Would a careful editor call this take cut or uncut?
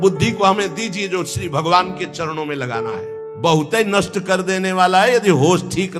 cut